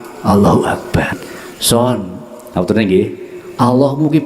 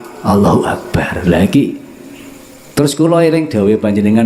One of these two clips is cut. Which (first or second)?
first